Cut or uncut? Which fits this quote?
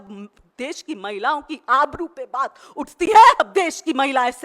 cut